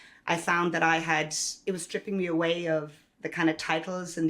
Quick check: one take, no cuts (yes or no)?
no